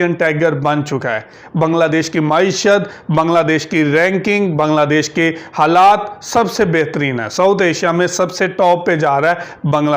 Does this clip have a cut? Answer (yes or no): no